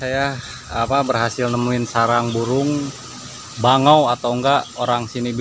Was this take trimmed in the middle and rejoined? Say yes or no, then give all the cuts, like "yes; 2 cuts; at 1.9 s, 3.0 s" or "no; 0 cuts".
no; 0 cuts